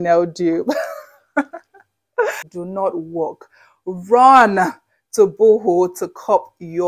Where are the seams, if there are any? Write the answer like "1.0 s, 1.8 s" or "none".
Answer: 2.5 s